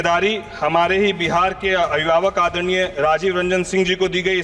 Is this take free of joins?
yes; 0 cuts

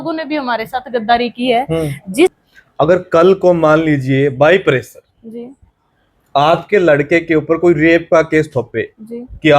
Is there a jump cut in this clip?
yes; 1 cut; at 2.3 s

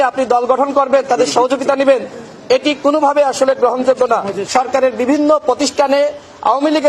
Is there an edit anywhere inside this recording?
yes; 1 cut; at 4.4 s

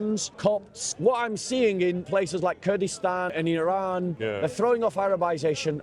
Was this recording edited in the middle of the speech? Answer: yes; 4 cuts; at 0.7 s, 2.0 s, 3.3 s, 4.2 s

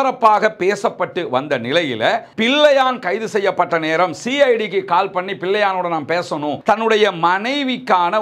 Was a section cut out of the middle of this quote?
yes; 2 cuts; at 2.3 s, 6.6 s

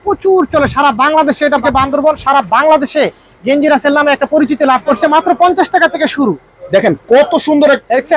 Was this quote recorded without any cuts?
no; 2 cuts; at 1.6 s, 5.0 s

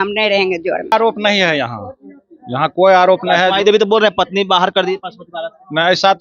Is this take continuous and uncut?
no; 1 cut; at 0.9 s

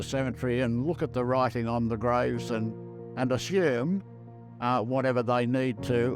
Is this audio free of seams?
yes; 0 cuts

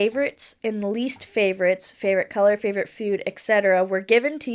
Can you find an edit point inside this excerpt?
no; 0 cuts

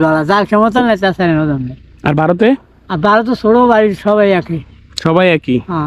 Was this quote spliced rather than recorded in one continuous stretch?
no; 0 cuts

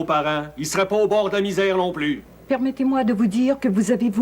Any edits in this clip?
yes; 1 cut; at 2.3 s

